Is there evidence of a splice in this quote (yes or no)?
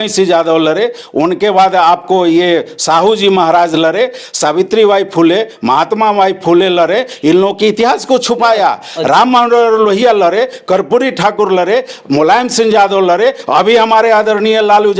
no